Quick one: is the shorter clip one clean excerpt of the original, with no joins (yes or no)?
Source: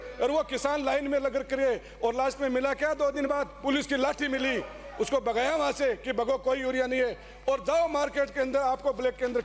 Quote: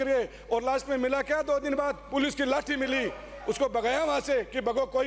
yes